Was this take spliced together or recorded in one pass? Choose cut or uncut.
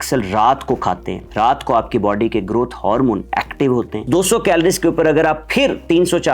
cut